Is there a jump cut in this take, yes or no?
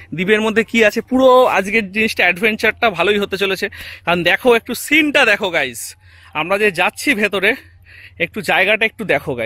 no